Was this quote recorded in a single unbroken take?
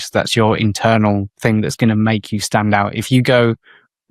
yes; 0 cuts

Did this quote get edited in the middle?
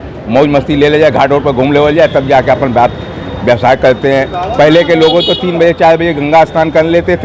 no; 0 cuts

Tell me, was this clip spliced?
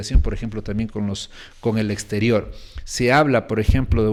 no; 0 cuts

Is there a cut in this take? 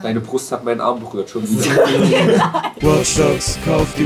yes; 1 cut; at 2.7 s

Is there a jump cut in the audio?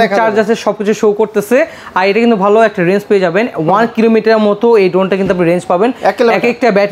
no; 0 cuts

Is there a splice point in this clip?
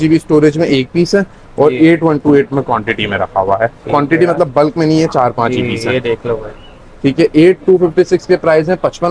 no; 0 cuts

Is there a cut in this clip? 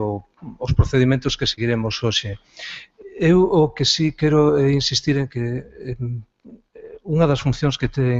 no; 0 cuts

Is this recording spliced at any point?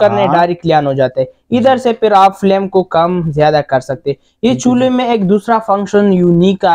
no; 0 cuts

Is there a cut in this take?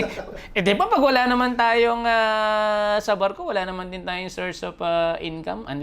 no; 0 cuts

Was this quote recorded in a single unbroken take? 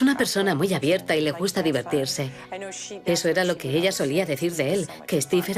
no; 1 cut; at 4.7 s

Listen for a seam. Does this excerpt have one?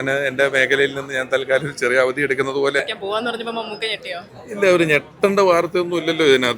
yes; 1 cut; at 2.8 s

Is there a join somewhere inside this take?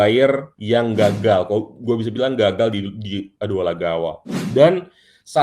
yes; 1 cut; at 4.3 s

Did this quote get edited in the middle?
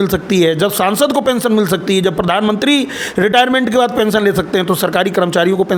no; 0 cuts

